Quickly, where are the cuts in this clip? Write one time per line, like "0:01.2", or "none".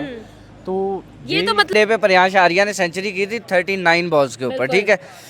0:01.7

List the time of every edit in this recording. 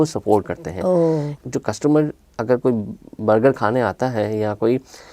0:01.3

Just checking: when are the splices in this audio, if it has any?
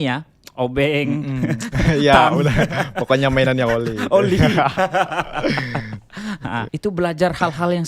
0:06.7

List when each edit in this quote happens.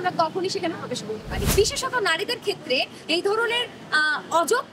0:01.4

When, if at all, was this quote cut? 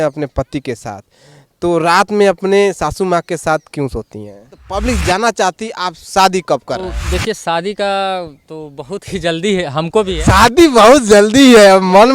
0:04.6
0:07.0
0:10.1

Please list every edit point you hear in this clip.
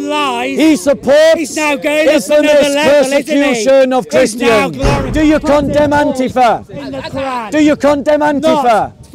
0:05.0

